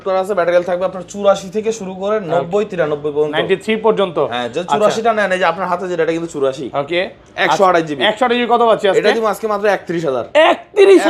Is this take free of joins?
yes; 0 cuts

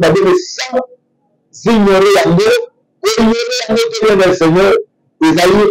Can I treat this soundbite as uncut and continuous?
yes; 0 cuts

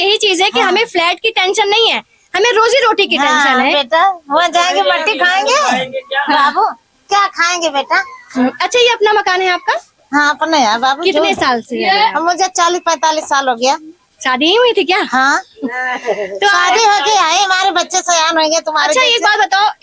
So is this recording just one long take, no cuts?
yes; 0 cuts

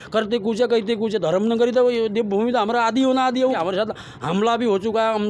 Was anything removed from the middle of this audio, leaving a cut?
yes; 1 cut; at 3.6 s

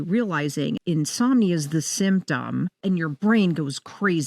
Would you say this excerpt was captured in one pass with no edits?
no; 2 cuts; at 0.8 s, 2.8 s

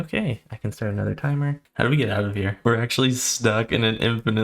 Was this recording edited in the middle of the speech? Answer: yes; 2 cuts; at 1.6 s, 2.5 s

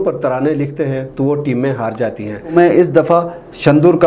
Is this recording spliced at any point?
yes; 1 cut; at 2.5 s

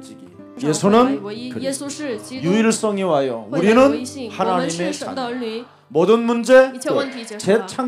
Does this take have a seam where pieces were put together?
no; 0 cuts

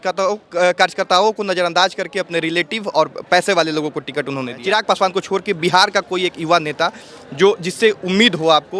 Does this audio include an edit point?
yes; 1 cut; at 4.6 s

